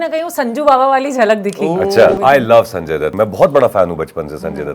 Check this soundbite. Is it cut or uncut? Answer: cut